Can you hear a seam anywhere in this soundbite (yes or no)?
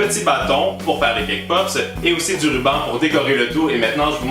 yes